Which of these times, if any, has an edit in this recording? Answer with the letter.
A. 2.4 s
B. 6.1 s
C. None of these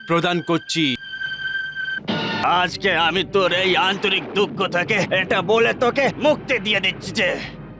A